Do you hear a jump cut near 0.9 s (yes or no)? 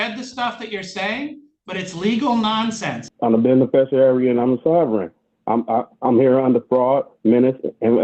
no